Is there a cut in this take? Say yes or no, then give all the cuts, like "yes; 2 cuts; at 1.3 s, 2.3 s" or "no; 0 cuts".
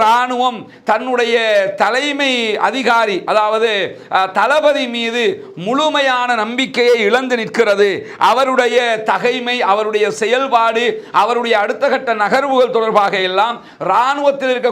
no; 0 cuts